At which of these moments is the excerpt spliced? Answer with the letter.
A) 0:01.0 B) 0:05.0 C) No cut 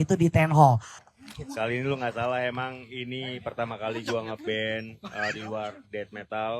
A